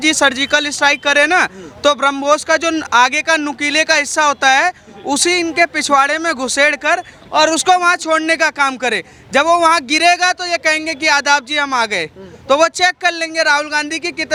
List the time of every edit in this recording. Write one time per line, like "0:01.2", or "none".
none